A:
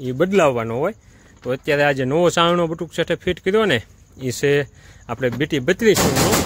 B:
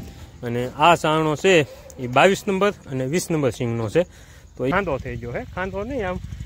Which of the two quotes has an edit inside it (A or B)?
B